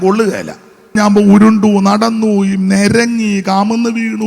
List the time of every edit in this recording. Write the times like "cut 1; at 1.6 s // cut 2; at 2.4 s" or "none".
cut 1; at 1.0 s